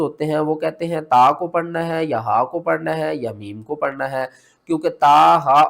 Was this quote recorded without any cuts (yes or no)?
yes